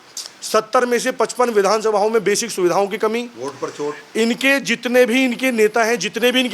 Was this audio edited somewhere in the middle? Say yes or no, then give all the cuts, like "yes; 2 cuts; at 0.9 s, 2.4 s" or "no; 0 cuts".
no; 0 cuts